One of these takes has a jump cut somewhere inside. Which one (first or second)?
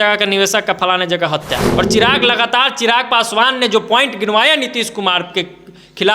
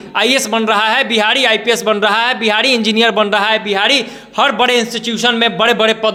first